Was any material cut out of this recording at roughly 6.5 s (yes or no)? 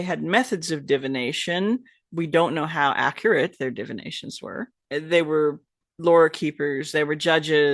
no